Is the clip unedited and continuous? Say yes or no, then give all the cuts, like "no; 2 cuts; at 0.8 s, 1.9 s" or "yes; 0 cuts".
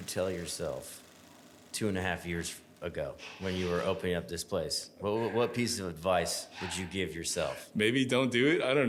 yes; 0 cuts